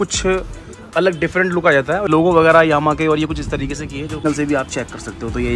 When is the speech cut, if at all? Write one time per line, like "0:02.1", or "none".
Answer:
0:02.1
0:04.2